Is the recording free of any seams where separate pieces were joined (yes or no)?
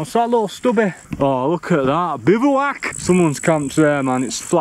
no